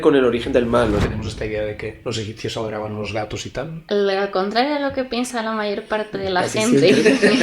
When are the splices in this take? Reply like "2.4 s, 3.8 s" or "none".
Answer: 1.1 s, 2.0 s, 3.8 s